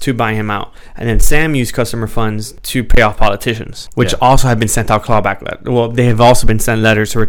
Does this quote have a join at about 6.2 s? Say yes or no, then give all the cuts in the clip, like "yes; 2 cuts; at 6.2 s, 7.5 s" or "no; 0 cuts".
no; 2 cuts; at 2.5 s, 3.8 s